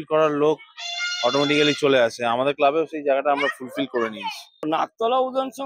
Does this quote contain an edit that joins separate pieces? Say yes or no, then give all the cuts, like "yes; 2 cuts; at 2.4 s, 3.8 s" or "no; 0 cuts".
yes; 1 cut; at 4.5 s